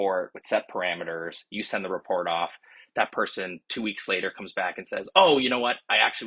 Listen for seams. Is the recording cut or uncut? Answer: uncut